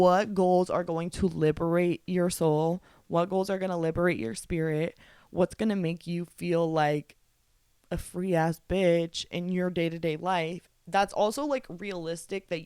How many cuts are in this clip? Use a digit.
0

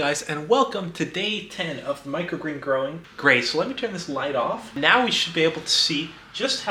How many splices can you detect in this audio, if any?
2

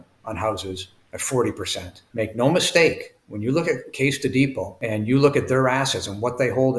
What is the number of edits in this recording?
1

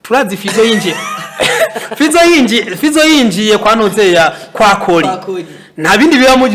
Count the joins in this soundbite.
0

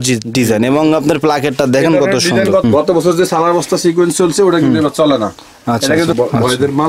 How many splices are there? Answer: 2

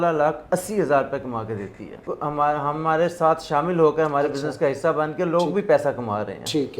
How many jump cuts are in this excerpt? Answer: 1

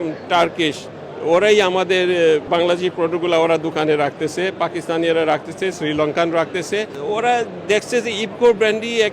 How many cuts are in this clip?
2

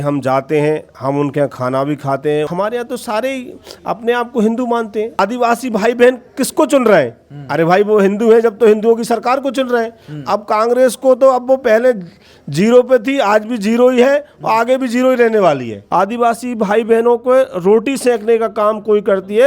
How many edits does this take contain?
3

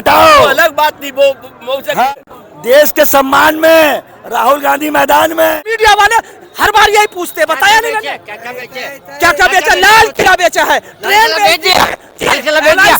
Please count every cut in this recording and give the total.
2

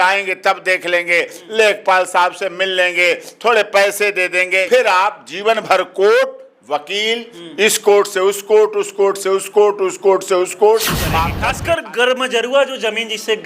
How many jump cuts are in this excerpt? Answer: 2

